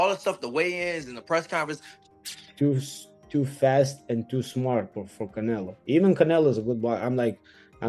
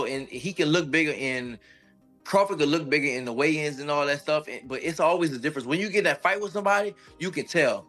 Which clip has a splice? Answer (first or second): first